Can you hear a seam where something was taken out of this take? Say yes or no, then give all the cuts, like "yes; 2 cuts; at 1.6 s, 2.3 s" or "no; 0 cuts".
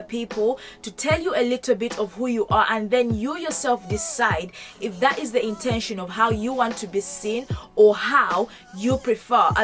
no; 0 cuts